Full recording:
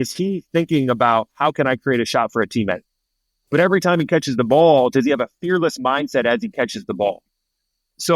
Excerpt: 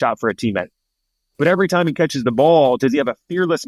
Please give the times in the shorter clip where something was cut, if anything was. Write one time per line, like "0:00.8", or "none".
none